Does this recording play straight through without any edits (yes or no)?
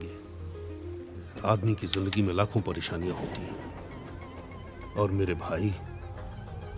no